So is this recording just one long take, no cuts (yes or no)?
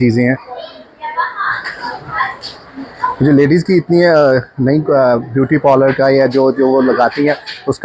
yes